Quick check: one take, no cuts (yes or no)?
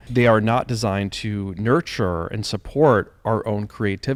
yes